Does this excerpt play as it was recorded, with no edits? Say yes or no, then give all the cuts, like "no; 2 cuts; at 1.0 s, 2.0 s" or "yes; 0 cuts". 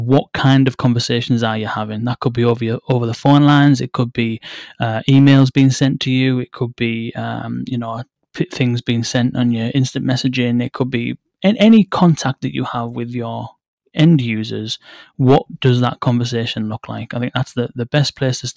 yes; 0 cuts